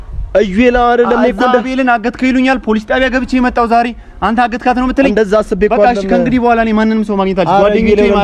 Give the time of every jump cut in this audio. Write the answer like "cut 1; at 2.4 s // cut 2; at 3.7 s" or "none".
none